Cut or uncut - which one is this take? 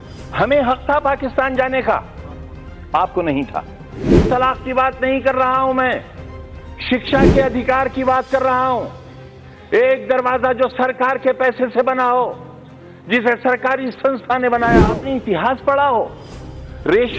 cut